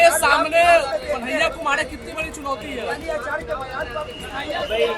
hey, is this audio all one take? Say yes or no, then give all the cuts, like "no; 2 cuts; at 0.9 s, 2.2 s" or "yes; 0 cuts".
yes; 0 cuts